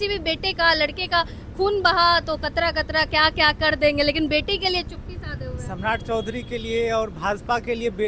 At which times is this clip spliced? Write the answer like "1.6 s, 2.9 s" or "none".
none